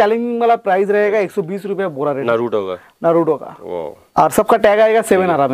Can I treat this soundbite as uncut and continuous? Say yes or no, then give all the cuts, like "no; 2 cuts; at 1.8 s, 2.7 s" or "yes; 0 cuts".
no; 2 cuts; at 2.2 s, 4.0 s